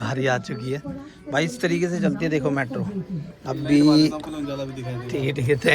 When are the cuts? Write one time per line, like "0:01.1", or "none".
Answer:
none